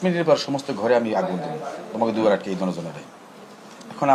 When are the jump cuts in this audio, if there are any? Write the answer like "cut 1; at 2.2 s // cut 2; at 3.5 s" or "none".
none